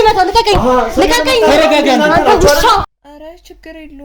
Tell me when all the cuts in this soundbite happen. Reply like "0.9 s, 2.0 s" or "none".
2.9 s